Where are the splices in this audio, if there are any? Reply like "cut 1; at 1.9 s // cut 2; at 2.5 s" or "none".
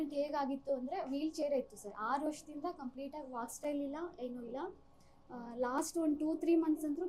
none